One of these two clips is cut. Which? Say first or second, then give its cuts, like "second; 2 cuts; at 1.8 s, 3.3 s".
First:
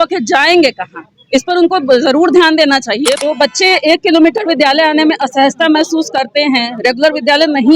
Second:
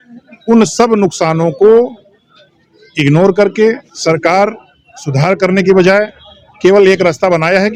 first; 1 cut; at 3.1 s